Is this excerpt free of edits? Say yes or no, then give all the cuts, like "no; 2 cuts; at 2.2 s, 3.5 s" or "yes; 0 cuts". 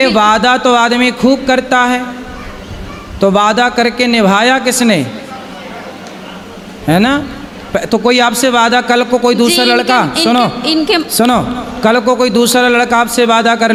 yes; 0 cuts